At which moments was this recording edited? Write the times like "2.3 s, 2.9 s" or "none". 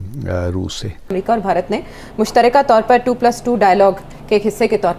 1.0 s